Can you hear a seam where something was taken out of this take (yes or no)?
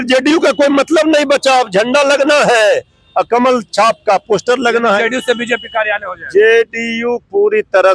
no